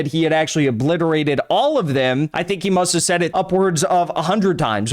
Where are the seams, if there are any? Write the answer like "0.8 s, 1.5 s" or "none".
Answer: 2.3 s, 3.3 s